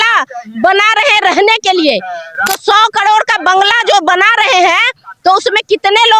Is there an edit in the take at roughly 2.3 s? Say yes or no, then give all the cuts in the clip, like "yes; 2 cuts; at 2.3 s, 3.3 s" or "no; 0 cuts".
no; 0 cuts